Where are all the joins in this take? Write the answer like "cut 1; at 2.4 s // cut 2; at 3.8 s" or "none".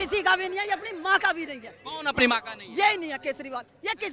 none